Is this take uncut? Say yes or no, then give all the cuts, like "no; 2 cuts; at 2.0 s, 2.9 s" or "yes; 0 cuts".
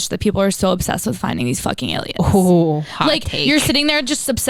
yes; 0 cuts